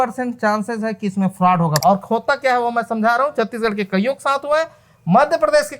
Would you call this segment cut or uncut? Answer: cut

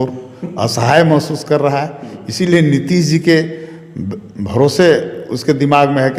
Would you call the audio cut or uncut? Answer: uncut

